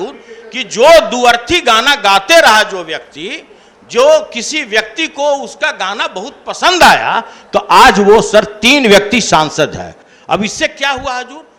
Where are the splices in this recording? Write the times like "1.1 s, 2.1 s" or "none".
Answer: none